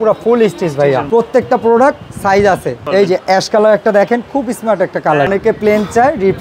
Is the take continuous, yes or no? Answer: no